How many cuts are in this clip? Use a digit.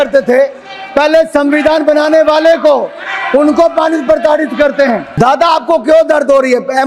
1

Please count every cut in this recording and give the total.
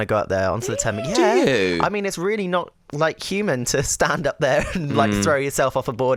0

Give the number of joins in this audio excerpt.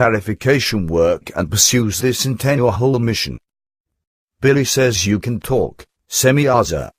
0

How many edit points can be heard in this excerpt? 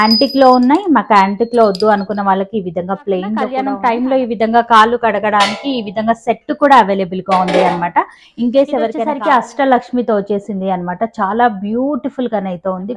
2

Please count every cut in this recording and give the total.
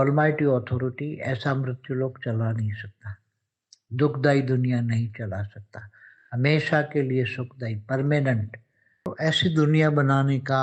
1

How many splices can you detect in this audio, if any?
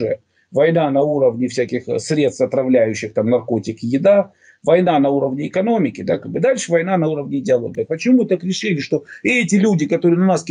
1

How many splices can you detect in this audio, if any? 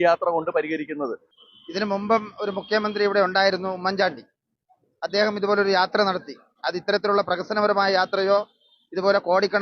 1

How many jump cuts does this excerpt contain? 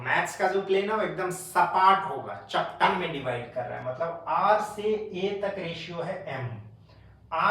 1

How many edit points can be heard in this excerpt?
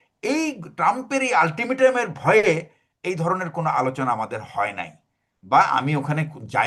0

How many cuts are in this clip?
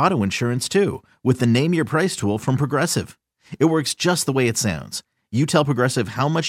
0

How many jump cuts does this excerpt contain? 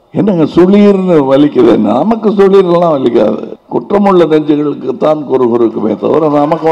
1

